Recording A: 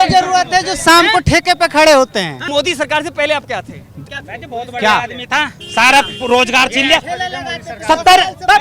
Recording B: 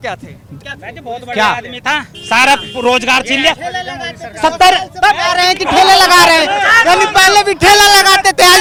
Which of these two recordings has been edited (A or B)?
A